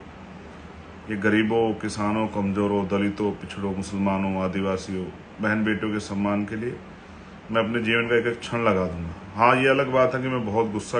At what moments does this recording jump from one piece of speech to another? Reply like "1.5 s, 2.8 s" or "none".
none

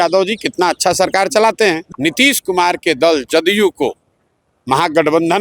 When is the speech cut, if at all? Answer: 1.9 s

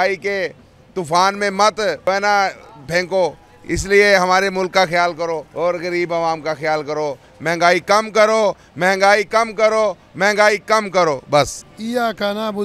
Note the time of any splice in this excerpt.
2.0 s, 5.5 s, 11.7 s

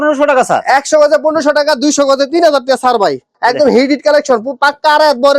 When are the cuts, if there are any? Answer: 3.3 s

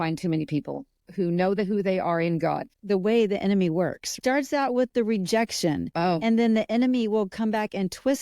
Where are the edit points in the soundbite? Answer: 1.0 s, 2.7 s, 4.1 s

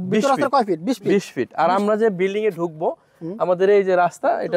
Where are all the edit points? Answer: none

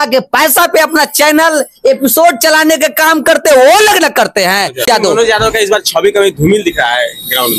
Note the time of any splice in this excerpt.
4.8 s

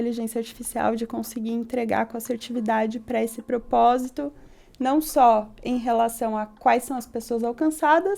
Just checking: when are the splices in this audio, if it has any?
none

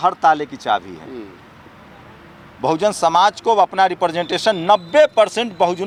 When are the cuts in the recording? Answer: none

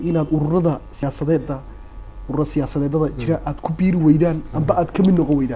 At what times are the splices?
1.0 s

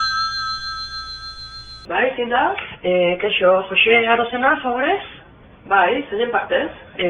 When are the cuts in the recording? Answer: 1.8 s

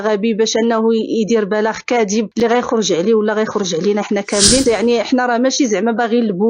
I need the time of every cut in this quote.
4.6 s

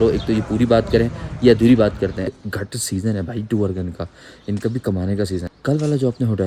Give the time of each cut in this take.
2.3 s, 5.5 s

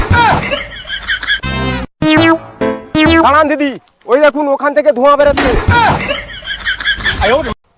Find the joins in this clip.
1.2 s

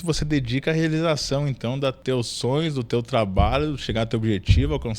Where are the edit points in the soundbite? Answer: 2.0 s

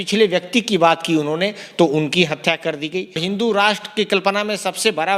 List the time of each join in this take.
3.2 s

